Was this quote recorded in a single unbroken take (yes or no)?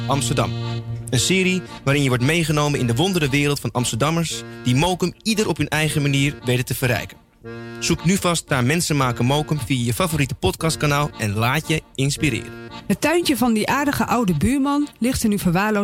no